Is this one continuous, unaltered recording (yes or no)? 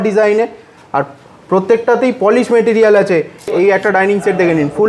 no